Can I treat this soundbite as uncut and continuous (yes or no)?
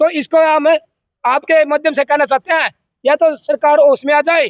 yes